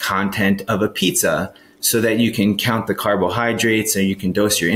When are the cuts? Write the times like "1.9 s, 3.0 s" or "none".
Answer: none